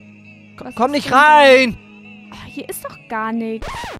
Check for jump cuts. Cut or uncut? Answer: cut